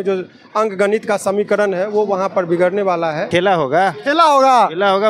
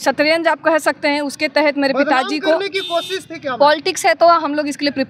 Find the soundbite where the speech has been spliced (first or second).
first